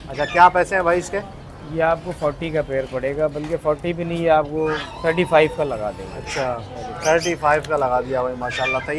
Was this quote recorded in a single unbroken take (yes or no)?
yes